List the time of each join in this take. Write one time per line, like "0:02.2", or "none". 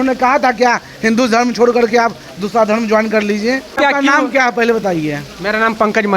0:03.8